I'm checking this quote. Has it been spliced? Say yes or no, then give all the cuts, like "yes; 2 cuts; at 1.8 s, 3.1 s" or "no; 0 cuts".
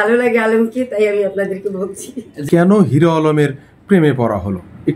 yes; 1 cut; at 2.4 s